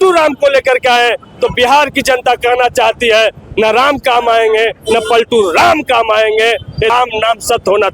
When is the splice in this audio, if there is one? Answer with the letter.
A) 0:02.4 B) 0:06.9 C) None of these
B